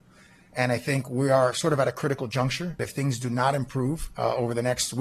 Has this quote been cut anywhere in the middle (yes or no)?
yes